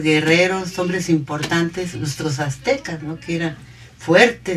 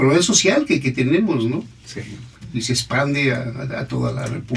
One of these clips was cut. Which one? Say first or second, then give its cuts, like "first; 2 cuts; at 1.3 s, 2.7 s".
first; 1 cut; at 2.7 s